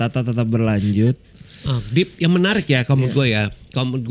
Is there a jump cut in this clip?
no; 0 cuts

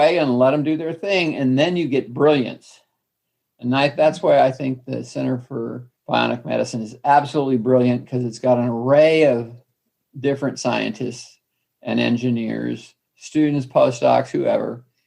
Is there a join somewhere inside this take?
yes; 1 cut; at 5.9 s

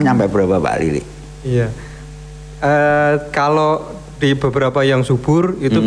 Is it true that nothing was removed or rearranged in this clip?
yes; 0 cuts

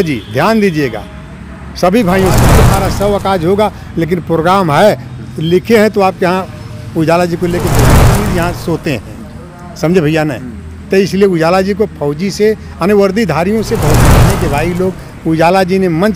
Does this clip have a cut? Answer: yes; 3 cuts; at 2.7 s, 8.1 s, 14.1 s

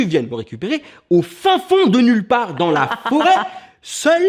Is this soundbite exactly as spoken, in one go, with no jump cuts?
yes; 0 cuts

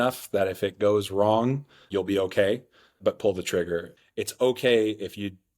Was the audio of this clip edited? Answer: yes; 1 cut; at 3.9 s

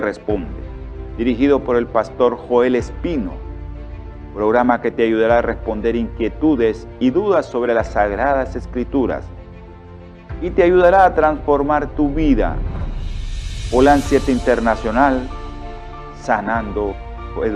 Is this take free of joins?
yes; 0 cuts

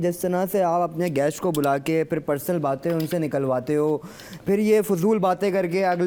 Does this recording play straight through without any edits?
yes; 0 cuts

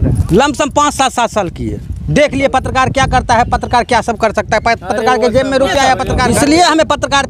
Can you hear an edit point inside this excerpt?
yes; 1 cut; at 6.2 s

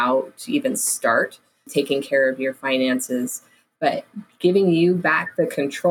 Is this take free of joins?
no; 1 cut; at 1.7 s

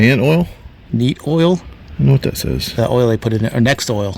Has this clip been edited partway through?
yes; 1 cut; at 1.8 s

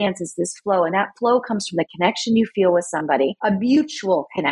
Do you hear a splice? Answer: no; 0 cuts

